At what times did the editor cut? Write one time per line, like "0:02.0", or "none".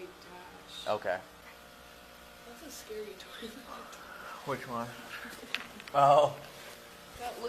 0:01.4